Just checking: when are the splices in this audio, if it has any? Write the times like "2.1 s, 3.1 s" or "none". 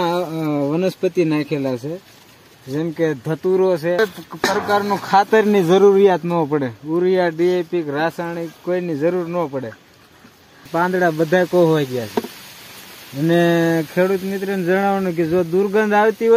4.0 s, 10.7 s